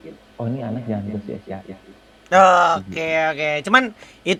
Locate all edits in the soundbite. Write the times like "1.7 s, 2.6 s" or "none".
none

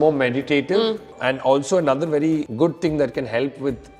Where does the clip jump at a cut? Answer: 1.1 s, 2.4 s

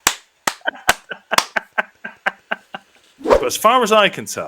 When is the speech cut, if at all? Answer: 3.3 s

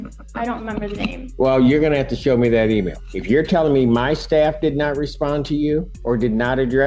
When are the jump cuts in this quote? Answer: 3.0 s, 5.9 s

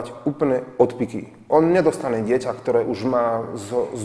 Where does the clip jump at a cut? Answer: none

